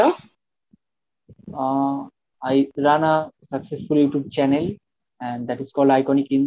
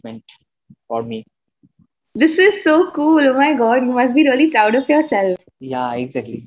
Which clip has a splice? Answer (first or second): first